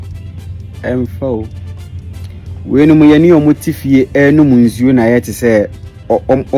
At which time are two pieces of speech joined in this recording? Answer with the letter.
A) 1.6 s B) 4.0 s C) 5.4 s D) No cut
A